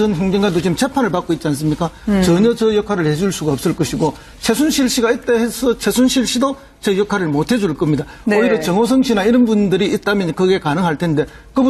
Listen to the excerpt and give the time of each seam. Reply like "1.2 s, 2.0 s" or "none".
7.7 s